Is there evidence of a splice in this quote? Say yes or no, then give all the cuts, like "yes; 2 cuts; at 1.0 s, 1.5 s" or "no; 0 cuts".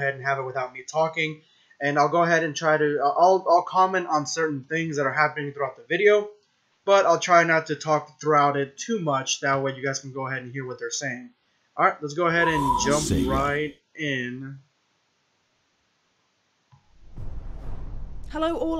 yes; 1 cut; at 10.0 s